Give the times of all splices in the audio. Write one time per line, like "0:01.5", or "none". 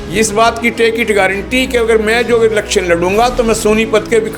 none